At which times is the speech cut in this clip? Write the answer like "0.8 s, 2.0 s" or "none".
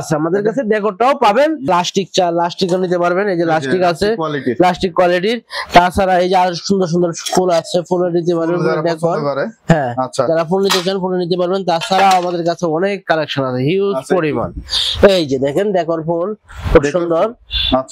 1.7 s

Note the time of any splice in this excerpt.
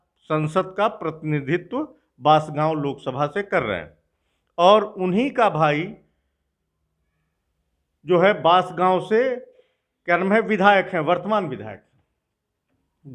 none

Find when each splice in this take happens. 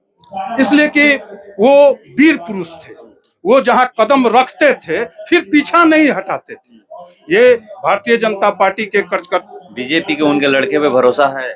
9.4 s

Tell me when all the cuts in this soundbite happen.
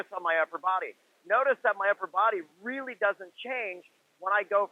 none

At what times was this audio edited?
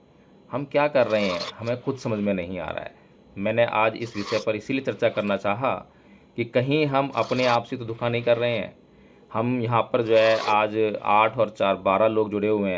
none

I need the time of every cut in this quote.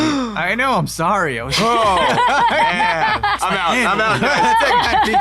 3.4 s

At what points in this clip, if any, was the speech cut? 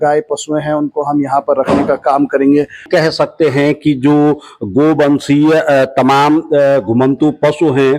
2.9 s

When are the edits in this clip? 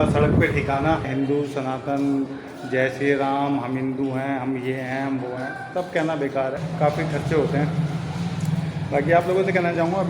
1.1 s, 6.6 s

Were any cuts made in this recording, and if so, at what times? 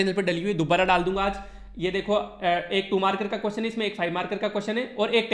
none

